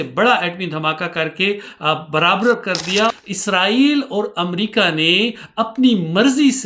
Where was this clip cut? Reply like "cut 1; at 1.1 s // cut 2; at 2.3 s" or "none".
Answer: cut 1; at 3.2 s